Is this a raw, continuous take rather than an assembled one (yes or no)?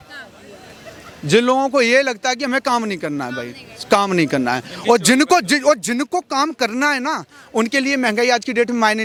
yes